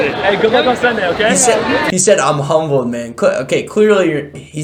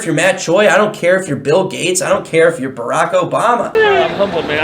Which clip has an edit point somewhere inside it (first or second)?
second